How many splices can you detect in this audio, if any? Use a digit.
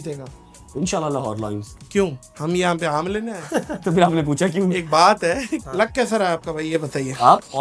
2